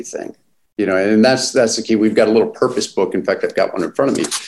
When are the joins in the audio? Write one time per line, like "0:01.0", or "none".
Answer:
none